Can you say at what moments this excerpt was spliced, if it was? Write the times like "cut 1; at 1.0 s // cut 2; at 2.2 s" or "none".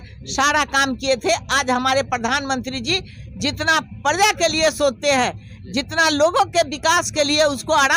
none